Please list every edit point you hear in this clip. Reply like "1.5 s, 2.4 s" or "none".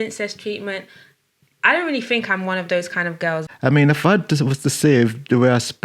3.5 s